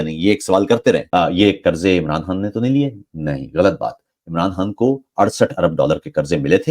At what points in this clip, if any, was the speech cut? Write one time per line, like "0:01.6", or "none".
0:01.0